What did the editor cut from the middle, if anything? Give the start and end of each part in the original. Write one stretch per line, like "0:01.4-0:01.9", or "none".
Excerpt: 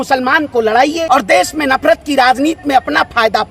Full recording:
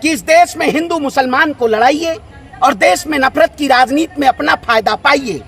0:02.1-0:02.5

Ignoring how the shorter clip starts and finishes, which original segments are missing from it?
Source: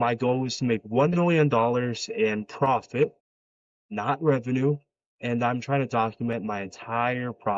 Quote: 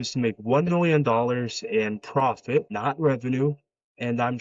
0:03.2-0:03.9

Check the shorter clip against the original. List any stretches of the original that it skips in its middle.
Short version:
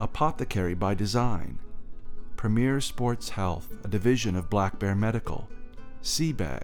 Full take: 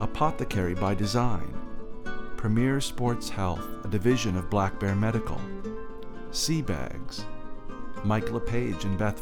0:05.5-0:05.8

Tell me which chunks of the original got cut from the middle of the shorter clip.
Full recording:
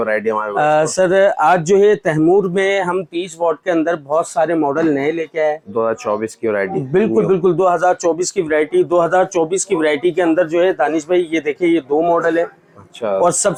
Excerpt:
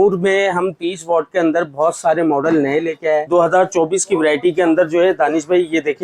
0:05.6-0:08.9

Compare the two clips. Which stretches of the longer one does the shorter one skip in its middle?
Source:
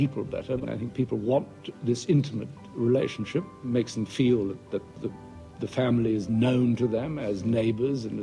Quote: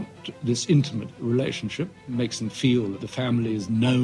0:02.5-0:02.6
0:04.6-0:05.6

